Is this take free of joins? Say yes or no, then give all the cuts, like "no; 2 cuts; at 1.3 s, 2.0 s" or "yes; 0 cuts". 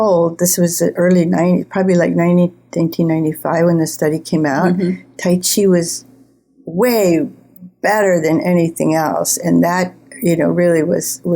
yes; 0 cuts